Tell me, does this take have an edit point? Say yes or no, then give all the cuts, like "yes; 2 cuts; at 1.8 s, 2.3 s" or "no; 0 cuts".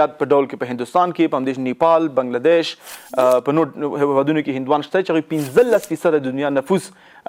no; 0 cuts